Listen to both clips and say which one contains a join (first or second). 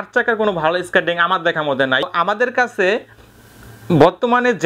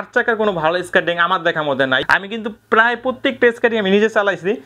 second